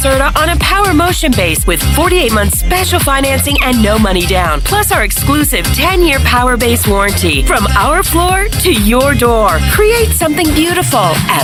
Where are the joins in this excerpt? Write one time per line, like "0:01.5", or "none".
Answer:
none

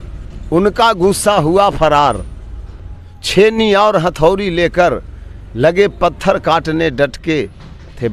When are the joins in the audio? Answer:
none

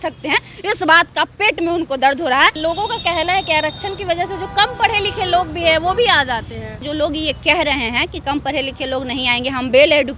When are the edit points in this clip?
0:02.6
0:06.7

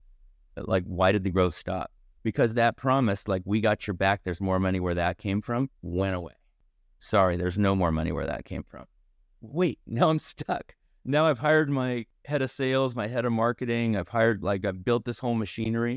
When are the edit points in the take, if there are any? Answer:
none

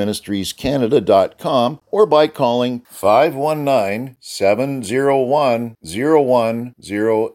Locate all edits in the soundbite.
0:01.8

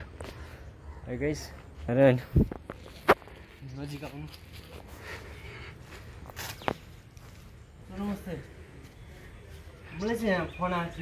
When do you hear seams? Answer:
0:01.9

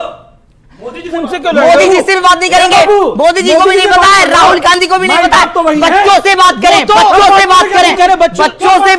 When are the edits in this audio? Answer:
none

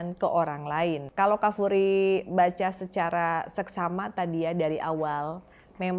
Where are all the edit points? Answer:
0:01.0

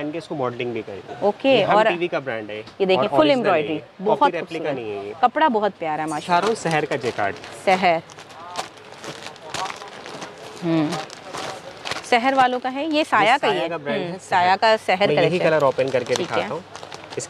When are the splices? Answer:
none

